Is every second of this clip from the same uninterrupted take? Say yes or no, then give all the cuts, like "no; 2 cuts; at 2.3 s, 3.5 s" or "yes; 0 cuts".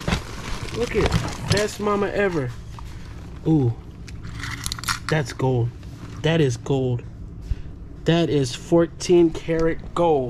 yes; 0 cuts